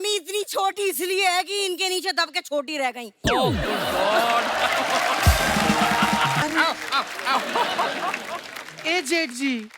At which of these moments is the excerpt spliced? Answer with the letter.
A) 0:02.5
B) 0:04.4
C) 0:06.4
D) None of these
C